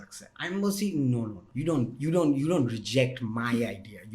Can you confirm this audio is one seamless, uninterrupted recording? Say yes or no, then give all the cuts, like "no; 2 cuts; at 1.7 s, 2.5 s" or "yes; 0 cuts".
no; 1 cut; at 1.4 s